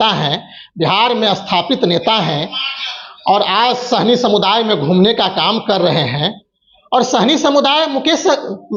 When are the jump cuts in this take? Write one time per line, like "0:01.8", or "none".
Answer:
none